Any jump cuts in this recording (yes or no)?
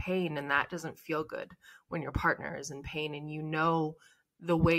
no